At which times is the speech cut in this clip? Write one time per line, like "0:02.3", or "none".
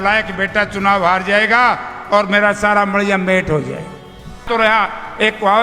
0:04.4